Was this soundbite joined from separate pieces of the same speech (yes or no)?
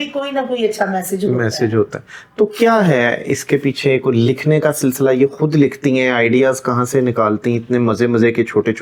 no